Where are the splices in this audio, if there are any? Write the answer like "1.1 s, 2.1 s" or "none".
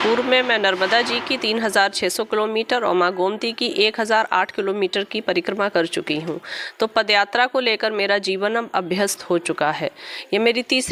none

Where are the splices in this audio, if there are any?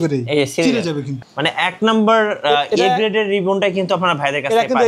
1.1 s

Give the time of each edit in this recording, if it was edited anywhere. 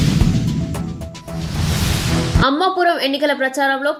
none

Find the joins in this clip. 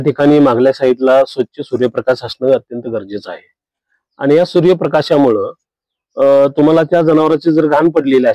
none

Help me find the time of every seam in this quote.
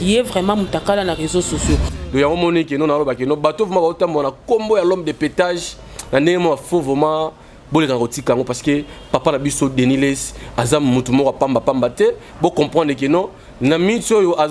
1.9 s

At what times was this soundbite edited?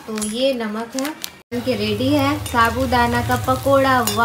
1.6 s

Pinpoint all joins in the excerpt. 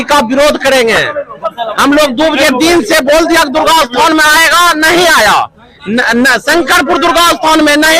none

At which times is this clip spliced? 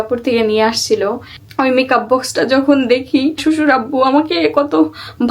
1.3 s, 3.4 s

